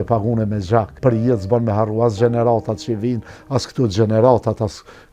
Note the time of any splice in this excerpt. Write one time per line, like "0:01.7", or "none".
0:00.9